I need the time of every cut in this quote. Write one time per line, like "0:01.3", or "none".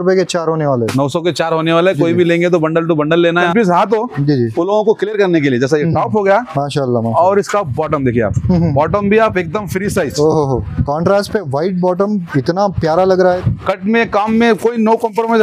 0:03.5
0:13.2